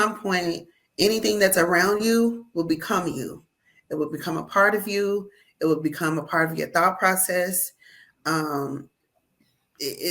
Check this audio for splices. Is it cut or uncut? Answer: uncut